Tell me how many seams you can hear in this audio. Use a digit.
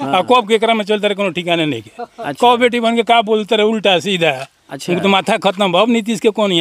0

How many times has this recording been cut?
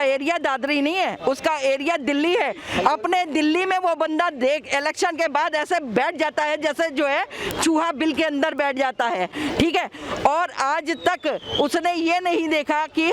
0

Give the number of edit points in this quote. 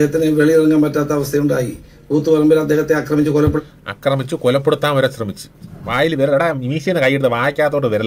0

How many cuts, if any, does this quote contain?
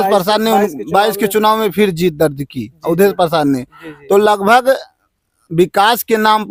0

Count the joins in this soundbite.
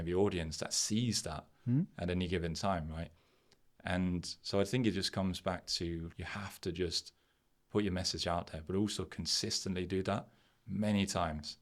1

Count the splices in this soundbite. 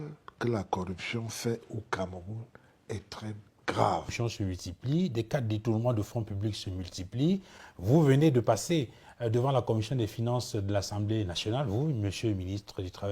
1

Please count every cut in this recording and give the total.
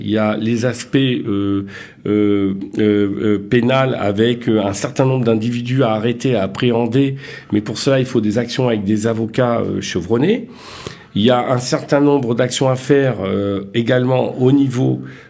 0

